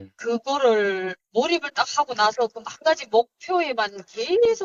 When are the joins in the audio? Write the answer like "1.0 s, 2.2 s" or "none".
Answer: none